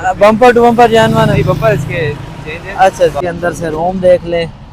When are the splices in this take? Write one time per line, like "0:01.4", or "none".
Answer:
0:03.2